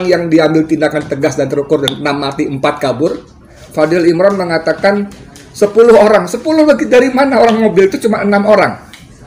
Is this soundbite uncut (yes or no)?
no